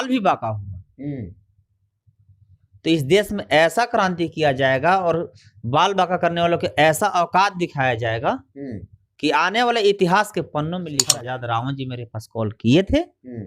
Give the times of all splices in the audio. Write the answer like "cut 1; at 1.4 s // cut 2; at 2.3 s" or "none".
cut 1; at 11.1 s

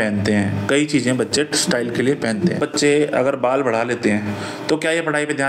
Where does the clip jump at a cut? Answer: none

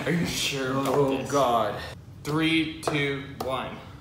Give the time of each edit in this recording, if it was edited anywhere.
cut 1; at 1.9 s

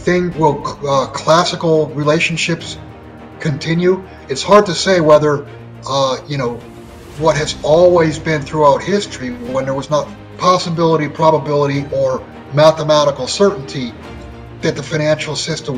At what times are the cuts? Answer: cut 1; at 10.2 s

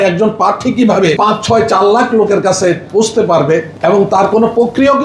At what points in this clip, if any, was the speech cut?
cut 1; at 1.2 s // cut 2; at 3.7 s

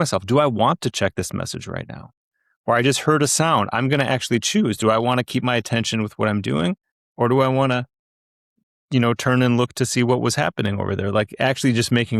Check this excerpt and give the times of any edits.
none

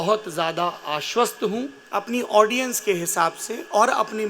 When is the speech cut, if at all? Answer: cut 1; at 1.8 s

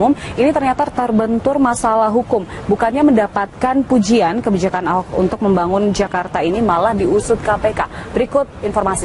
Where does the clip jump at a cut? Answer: cut 1; at 5.1 s

